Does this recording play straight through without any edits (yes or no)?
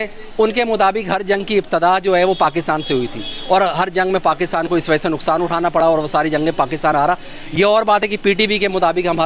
yes